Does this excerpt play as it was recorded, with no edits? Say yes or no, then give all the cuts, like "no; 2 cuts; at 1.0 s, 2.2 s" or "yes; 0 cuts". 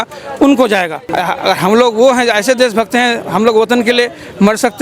no; 1 cut; at 1.0 s